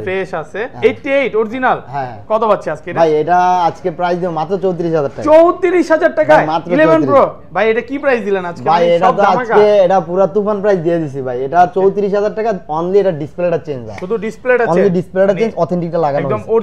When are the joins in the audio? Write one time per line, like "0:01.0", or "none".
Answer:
none